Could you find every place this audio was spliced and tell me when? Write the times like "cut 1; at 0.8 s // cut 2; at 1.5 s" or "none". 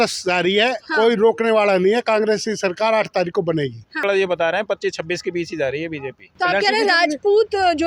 cut 1; at 4.0 s // cut 2; at 6.2 s